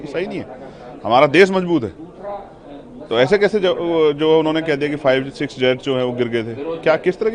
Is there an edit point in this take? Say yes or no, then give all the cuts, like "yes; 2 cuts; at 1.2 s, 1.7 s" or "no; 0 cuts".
no; 0 cuts